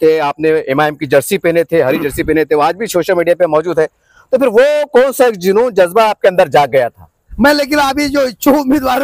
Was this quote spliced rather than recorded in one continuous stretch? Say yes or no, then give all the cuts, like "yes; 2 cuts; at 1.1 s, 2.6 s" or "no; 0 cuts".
yes; 1 cut; at 7.3 s